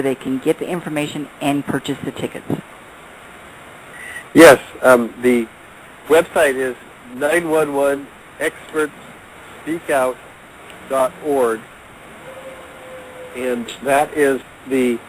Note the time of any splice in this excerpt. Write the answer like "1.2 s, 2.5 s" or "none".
6.3 s